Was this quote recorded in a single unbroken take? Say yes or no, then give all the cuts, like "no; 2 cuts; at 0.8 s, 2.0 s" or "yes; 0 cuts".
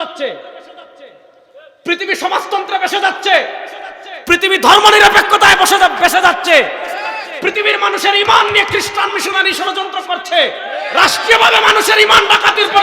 yes; 0 cuts